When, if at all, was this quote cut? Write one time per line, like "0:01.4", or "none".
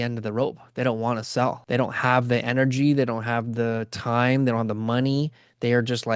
0:01.6